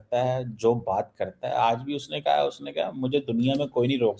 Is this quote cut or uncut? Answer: uncut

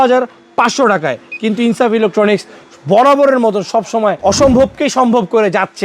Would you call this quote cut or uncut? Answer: cut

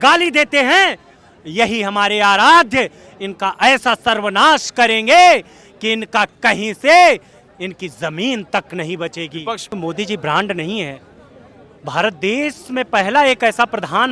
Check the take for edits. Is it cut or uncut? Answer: cut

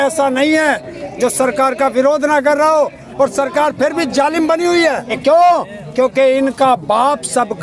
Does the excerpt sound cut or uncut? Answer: cut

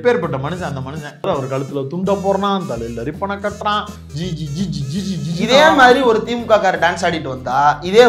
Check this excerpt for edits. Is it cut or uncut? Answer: cut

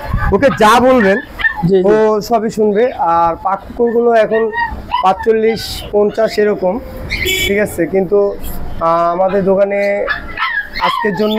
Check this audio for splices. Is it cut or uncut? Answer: uncut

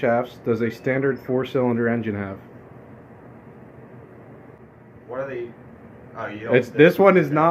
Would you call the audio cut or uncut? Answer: cut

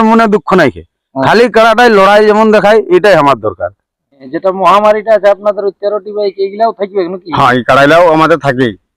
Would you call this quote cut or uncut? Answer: cut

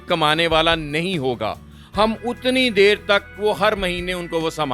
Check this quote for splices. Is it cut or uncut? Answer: uncut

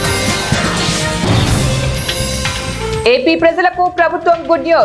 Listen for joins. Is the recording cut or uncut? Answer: cut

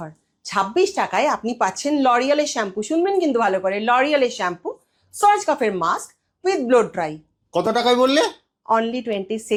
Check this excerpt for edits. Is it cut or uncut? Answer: uncut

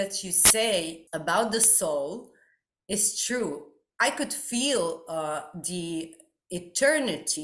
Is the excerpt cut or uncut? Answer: cut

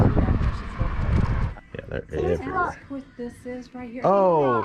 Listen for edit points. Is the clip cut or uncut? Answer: cut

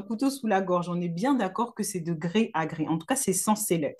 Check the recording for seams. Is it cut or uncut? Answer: uncut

